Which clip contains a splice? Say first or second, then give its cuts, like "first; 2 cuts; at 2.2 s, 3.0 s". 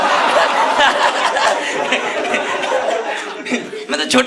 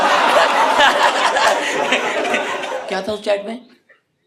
second; 1 cut; at 2.8 s